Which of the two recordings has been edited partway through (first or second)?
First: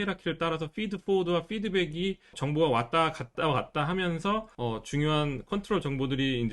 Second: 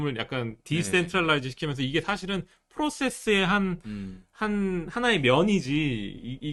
first